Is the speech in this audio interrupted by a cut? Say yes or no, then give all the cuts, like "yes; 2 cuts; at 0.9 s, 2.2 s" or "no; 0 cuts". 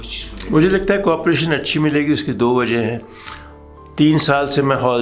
no; 0 cuts